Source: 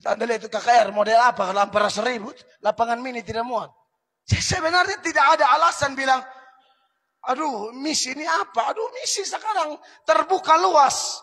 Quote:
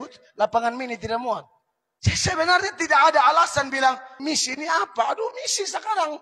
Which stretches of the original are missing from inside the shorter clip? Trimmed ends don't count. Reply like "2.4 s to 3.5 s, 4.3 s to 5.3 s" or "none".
6.4 s to 7.7 s